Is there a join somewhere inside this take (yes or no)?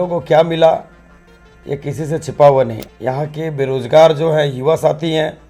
yes